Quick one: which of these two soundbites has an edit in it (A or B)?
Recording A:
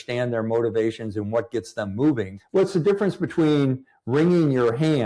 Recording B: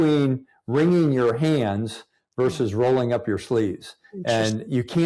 A